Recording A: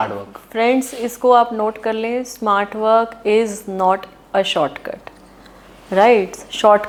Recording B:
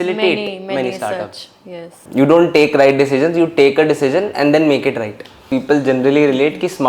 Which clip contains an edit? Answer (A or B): B